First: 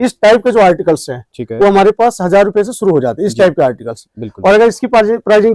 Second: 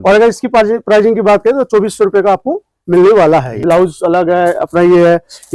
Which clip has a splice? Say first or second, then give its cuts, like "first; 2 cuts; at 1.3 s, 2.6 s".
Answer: second; 1 cut; at 3.6 s